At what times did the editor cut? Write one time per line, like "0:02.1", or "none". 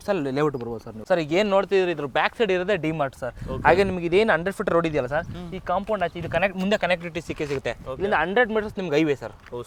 none